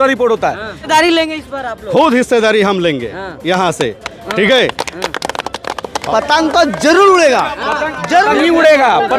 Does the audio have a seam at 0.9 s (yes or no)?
yes